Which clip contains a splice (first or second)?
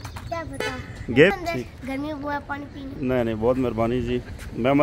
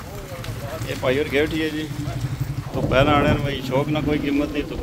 first